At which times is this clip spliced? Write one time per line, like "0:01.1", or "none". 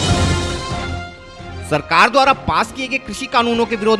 0:01.3